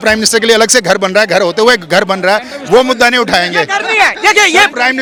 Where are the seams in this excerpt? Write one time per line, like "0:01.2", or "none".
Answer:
none